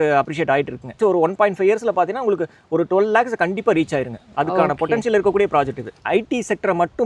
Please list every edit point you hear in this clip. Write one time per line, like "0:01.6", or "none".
0:00.9
0:05.9